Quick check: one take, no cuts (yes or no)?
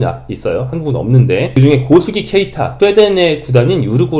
no